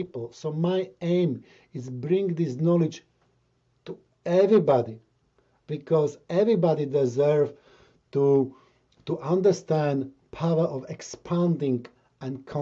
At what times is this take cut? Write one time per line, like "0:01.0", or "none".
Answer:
none